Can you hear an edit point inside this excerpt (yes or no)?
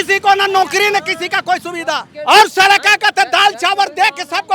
yes